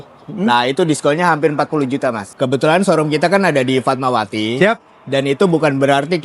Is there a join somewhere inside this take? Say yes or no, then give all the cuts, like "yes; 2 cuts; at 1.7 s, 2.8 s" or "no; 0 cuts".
yes; 1 cut; at 2.3 s